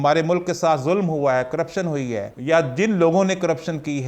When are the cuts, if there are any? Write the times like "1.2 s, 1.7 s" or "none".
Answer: 2.3 s